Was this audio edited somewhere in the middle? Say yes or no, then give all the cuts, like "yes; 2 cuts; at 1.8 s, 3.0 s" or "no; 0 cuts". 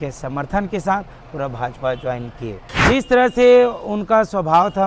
yes; 1 cut; at 2.7 s